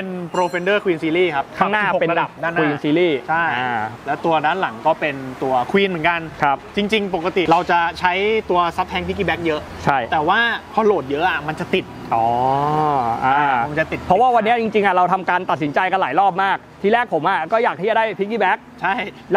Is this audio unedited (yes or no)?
yes